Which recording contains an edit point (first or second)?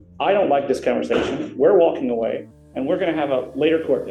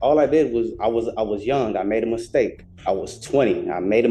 second